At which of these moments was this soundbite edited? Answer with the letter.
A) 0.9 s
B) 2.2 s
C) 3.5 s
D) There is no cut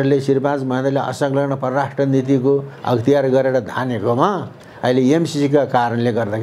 D